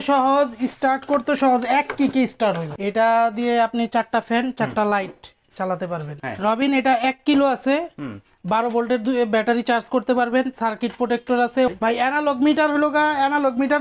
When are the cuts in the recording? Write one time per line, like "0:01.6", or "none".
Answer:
0:02.7
0:06.1
0:11.7